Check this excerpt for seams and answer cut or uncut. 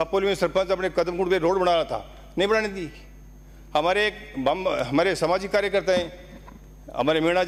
uncut